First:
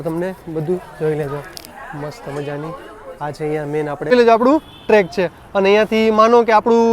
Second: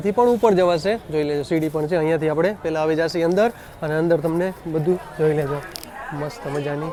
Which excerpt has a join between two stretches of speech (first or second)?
first